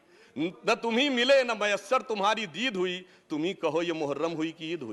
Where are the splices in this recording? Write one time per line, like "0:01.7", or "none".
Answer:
none